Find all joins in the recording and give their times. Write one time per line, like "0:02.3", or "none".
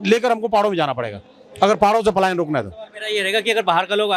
none